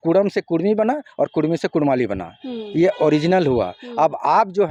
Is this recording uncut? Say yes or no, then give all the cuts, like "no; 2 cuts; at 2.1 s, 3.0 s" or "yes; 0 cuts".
yes; 0 cuts